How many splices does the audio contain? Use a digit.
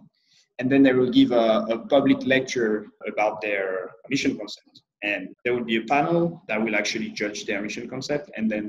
4